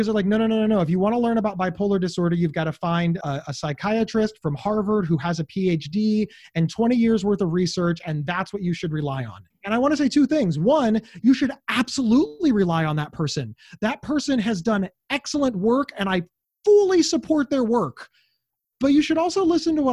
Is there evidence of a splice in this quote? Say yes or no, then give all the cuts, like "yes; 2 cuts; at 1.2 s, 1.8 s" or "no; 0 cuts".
yes; 1 cut; at 9.5 s